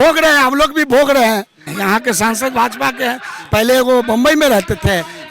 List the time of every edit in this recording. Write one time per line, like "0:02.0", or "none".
0:01.7